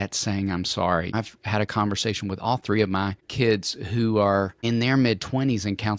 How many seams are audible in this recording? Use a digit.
3